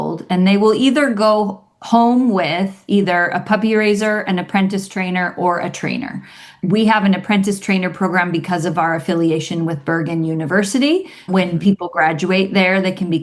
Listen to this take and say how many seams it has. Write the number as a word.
zero